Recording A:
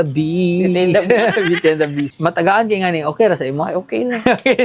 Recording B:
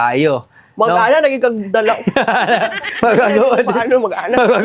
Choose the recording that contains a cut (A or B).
A